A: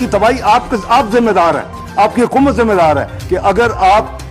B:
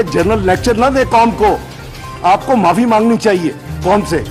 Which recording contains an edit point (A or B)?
A